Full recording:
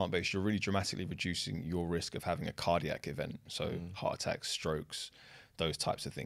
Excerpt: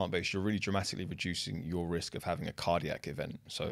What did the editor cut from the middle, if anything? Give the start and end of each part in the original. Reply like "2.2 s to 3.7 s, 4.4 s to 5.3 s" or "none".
none